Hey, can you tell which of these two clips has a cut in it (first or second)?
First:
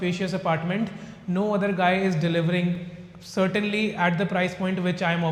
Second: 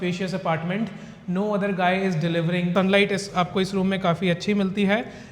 second